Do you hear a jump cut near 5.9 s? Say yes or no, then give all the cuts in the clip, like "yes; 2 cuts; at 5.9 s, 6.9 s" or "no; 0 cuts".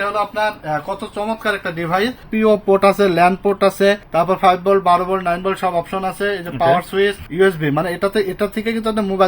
no; 3 cuts; at 2.3 s, 4.0 s, 7.2 s